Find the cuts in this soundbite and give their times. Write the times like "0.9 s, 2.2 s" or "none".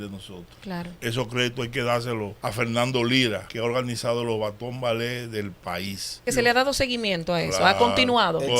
0.9 s, 2.4 s, 3.5 s, 6.2 s